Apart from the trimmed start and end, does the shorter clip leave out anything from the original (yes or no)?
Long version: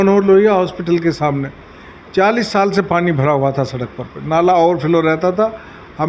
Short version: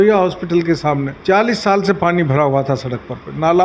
yes